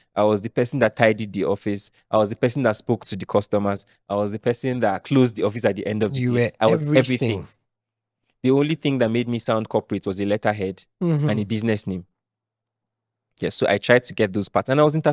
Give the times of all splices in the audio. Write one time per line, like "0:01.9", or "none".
none